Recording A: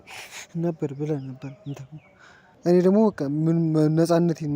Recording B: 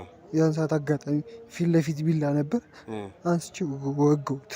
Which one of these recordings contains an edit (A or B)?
A